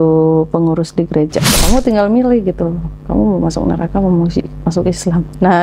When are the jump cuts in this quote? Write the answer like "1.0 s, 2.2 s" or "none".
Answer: 1.5 s